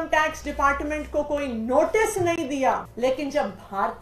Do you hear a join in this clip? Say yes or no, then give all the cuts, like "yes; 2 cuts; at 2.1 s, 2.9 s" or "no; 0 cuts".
yes; 1 cut; at 2.9 s